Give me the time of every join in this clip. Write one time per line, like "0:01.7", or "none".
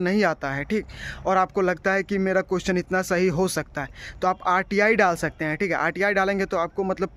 none